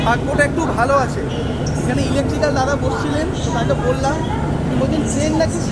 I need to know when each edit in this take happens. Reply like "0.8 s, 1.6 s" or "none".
none